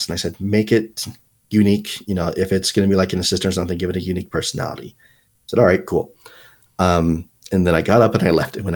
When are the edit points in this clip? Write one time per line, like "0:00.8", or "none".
none